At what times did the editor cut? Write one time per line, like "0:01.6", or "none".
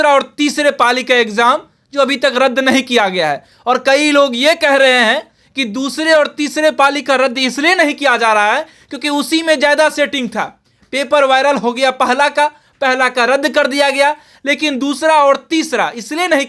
none